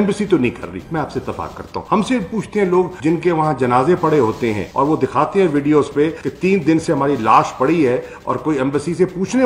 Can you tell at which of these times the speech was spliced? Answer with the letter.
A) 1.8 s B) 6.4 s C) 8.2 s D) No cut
A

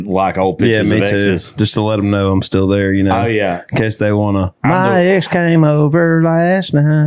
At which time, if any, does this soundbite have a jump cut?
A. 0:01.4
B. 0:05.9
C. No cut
C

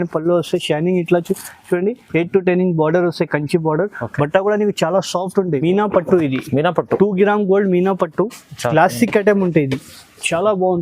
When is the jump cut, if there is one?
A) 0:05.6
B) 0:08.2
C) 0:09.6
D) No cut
A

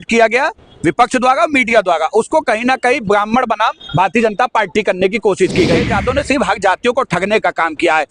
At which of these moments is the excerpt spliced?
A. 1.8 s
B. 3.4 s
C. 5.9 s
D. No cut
C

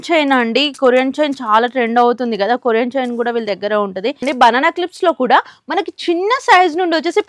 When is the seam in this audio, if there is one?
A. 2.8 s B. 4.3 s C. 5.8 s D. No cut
B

